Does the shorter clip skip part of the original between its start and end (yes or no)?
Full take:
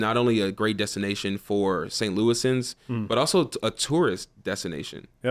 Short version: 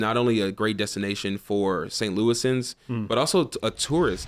no